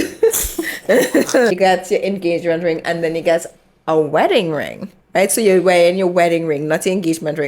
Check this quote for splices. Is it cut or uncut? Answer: cut